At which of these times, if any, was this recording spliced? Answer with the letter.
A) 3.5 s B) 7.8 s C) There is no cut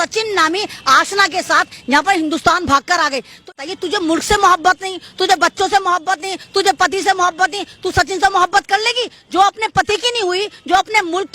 A